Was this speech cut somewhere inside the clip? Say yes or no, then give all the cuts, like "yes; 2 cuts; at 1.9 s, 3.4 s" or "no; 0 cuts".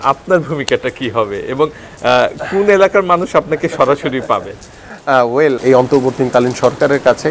no; 0 cuts